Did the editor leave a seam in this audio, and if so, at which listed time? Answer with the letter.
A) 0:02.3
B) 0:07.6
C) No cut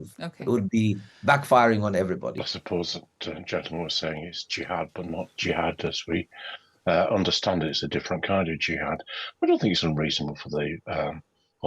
A